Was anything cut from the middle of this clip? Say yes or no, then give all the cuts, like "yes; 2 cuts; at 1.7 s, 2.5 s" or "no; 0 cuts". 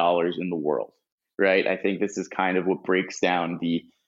no; 0 cuts